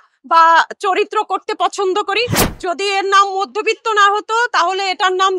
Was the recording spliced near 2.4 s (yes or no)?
yes